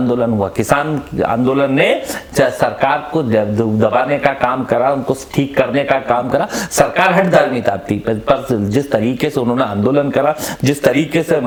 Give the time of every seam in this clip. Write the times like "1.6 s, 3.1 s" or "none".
none